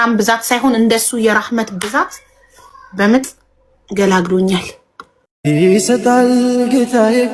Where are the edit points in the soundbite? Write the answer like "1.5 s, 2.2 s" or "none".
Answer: none